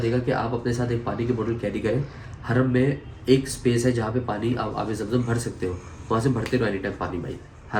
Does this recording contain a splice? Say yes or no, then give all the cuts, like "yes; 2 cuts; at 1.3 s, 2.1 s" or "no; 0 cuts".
no; 0 cuts